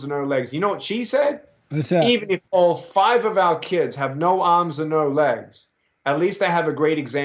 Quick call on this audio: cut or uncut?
uncut